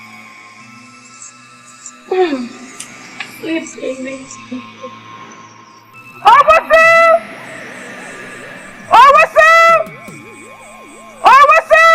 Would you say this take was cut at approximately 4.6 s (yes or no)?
yes